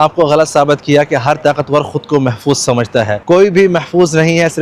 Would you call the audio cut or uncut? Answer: cut